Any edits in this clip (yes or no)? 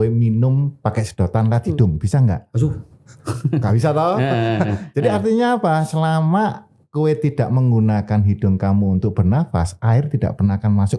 no